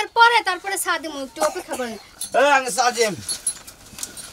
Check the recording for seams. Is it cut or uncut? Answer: cut